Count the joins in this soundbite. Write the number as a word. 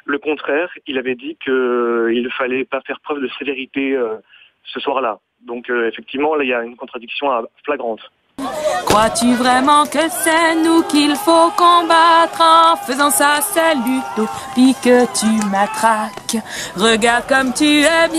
one